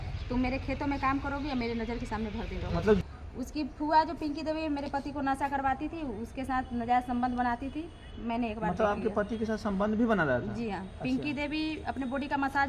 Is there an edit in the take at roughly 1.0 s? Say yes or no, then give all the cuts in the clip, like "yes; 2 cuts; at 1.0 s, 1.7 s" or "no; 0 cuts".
no; 1 cut; at 3.0 s